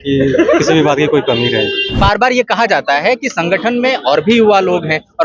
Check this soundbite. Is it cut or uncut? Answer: cut